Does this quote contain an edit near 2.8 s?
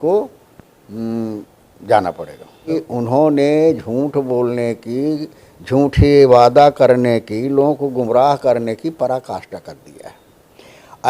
yes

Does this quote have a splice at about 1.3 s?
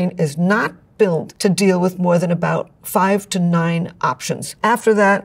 yes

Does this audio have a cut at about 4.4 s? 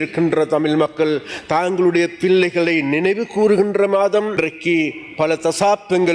yes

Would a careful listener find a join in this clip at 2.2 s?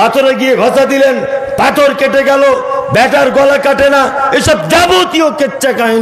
no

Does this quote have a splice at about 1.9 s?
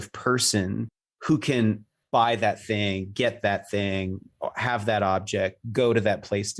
yes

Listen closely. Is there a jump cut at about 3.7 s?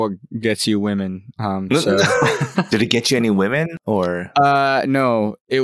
yes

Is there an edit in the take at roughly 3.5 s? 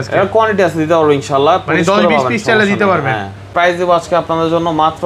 yes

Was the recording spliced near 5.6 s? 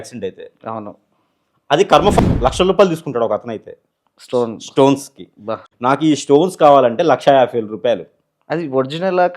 yes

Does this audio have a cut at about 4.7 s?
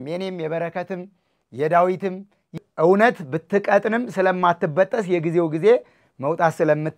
no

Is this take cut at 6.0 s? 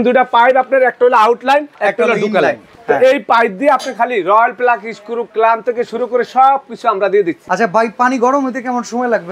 no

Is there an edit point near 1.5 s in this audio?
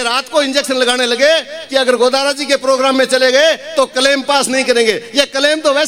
no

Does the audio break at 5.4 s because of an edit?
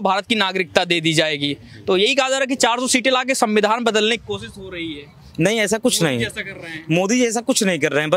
no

